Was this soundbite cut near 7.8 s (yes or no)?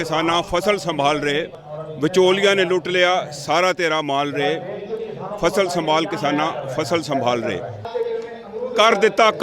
yes